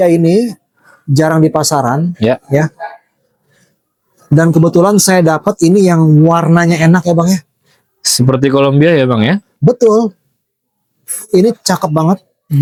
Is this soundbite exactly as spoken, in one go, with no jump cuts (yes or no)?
yes